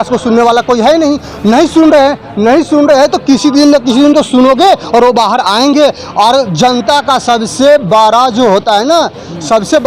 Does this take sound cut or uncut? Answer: uncut